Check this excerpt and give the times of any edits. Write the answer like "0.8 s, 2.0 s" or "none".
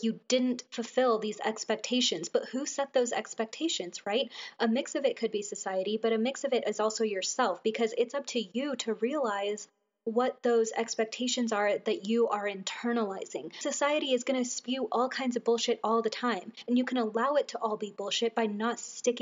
13.6 s, 16.5 s